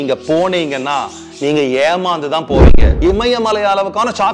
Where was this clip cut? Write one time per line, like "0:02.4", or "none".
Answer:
0:02.9